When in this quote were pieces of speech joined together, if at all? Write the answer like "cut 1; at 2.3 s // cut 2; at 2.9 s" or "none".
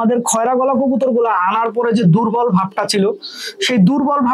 none